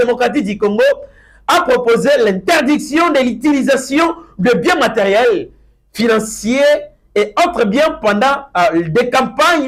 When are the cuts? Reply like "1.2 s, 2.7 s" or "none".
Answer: none